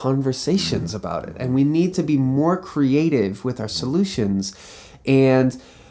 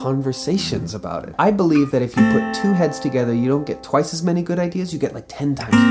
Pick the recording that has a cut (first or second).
second